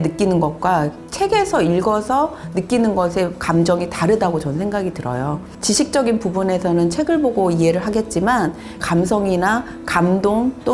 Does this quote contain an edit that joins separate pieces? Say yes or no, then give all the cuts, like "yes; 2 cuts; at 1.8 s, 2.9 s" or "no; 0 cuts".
no; 0 cuts